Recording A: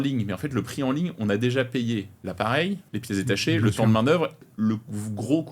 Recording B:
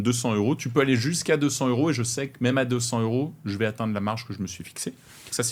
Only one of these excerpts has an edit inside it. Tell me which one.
A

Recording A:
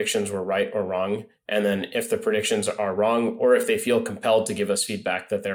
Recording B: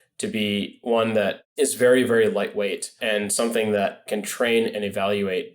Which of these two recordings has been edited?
B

